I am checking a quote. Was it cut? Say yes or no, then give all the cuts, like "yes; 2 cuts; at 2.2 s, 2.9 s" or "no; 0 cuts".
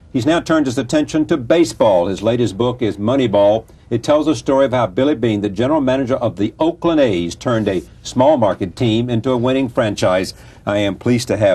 no; 0 cuts